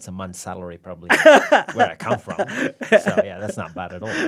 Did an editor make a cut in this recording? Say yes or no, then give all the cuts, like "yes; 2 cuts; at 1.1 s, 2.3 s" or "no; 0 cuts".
no; 0 cuts